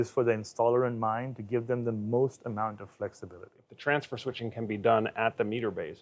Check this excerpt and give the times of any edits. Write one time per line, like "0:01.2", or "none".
0:03.7